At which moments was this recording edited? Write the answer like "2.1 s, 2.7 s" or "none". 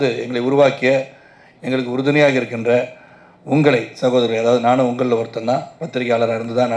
none